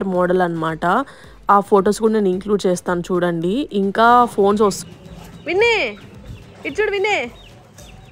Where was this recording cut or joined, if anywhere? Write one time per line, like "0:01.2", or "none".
0:04.7